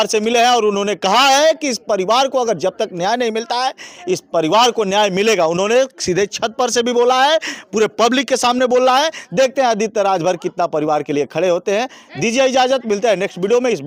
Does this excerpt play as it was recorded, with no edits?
yes; 0 cuts

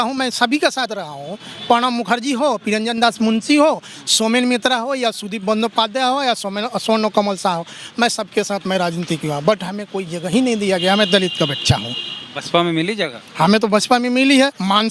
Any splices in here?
no; 0 cuts

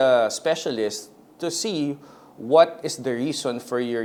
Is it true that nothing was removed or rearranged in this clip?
yes; 0 cuts

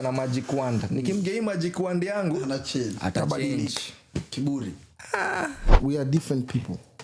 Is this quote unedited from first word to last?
no; 1 cut; at 5.7 s

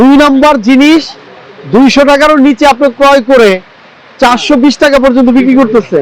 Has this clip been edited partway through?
no; 0 cuts

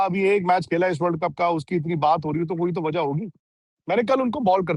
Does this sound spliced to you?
no; 0 cuts

